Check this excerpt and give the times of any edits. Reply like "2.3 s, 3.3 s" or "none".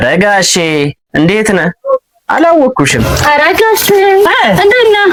none